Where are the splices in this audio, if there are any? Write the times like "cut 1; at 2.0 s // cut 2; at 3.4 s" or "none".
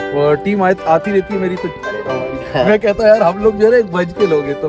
cut 1; at 1.8 s